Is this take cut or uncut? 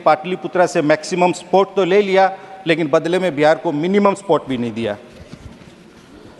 uncut